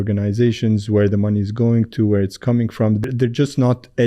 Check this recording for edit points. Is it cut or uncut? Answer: cut